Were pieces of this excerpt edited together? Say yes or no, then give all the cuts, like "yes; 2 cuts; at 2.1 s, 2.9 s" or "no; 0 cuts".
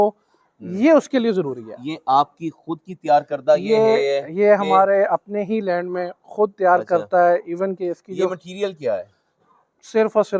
no; 0 cuts